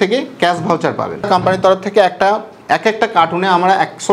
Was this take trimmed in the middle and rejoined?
yes; 1 cut; at 1.3 s

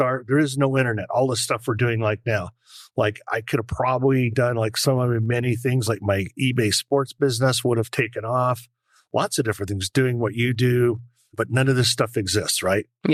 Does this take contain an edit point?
no; 0 cuts

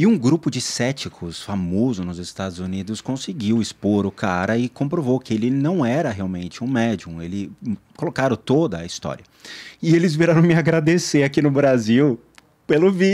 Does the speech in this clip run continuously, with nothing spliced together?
yes; 0 cuts

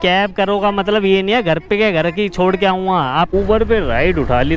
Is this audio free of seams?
no; 1 cut; at 3.3 s

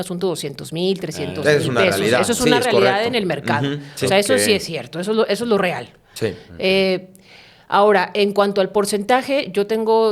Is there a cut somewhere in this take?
no; 0 cuts

